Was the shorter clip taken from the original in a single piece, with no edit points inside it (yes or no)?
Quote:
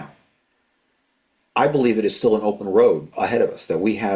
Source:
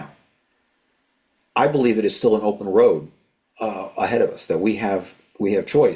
no